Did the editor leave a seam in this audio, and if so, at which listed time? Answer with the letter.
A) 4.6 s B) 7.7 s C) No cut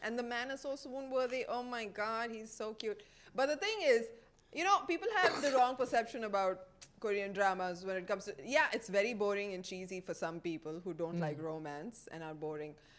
C